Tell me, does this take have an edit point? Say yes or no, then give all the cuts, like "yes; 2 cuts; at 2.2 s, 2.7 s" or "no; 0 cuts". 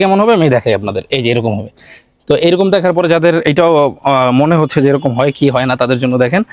no; 0 cuts